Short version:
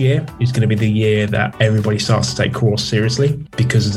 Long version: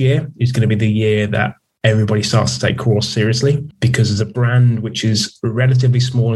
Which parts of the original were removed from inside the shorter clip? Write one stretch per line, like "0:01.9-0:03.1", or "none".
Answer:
0:01.5-0:01.8